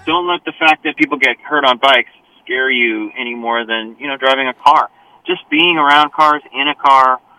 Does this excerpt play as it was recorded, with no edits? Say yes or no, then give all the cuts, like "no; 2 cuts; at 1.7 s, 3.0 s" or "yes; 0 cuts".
no; 1 cut; at 1.0 s